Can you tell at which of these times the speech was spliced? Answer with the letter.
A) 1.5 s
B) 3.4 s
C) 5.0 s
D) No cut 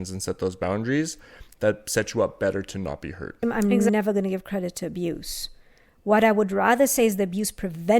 B